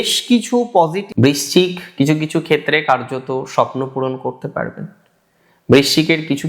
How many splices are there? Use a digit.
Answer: 1